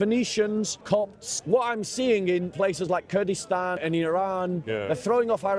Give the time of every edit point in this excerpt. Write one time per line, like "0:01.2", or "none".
0:01.1
0:02.5
0:03.8
0:04.6